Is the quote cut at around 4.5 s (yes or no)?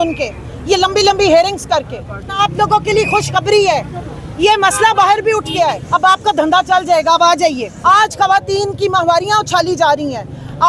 no